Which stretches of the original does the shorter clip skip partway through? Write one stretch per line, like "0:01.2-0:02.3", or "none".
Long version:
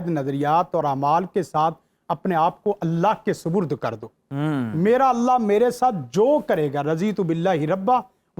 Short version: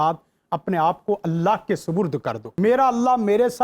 0:04.1-0:04.7